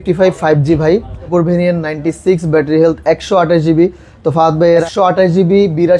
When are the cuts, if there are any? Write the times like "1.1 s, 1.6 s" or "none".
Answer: 1.3 s, 4.8 s